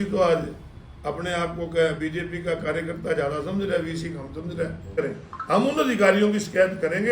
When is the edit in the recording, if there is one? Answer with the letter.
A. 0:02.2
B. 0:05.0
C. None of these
B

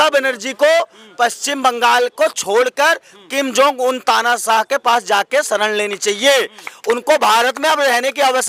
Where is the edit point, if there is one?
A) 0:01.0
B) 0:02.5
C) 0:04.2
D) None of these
D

